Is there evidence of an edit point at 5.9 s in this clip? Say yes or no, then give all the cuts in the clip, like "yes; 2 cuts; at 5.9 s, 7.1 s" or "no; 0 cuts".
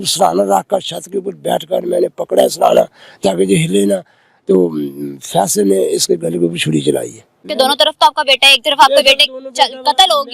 no; 1 cut; at 7.4 s